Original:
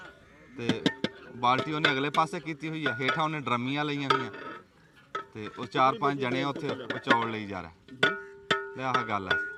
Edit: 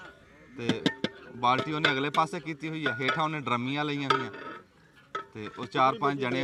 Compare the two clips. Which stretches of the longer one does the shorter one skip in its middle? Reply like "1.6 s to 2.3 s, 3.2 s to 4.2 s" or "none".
none